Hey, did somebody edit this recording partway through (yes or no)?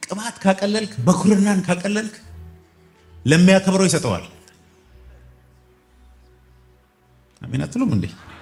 no